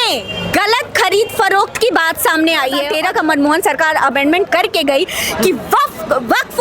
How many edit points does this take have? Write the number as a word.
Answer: one